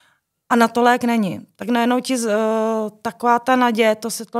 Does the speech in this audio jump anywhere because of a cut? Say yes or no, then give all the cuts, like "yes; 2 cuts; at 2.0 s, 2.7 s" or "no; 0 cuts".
no; 0 cuts